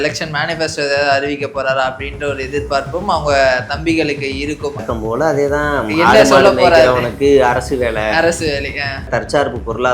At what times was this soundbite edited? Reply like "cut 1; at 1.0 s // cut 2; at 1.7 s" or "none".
cut 1; at 4.8 s // cut 2; at 9.1 s